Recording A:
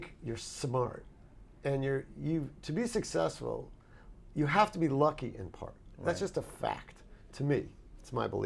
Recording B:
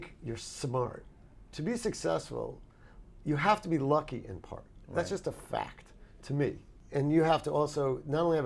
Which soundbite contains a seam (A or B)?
B